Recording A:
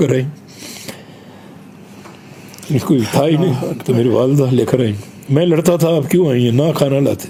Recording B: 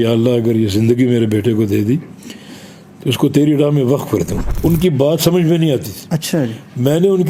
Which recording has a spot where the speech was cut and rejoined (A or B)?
B